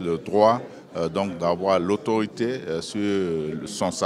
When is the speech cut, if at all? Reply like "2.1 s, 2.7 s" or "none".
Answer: none